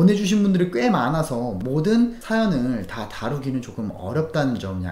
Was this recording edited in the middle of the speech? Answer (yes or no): yes